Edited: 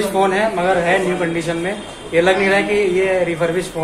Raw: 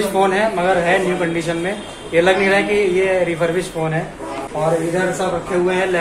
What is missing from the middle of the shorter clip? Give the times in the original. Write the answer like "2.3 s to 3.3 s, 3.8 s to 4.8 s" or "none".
none

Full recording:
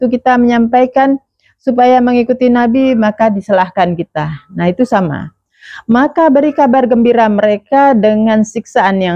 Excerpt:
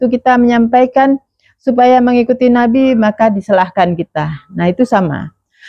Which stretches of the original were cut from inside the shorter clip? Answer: none

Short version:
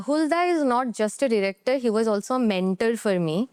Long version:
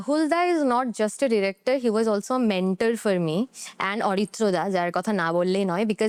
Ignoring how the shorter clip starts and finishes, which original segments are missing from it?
none

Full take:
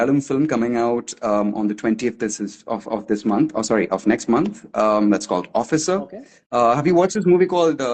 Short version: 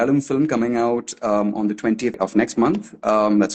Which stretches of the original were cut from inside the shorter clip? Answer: 2.2 s to 3.9 s

